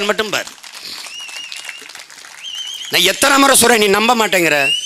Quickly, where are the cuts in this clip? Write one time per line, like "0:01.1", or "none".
none